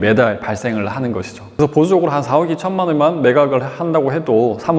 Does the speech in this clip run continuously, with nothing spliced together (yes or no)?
no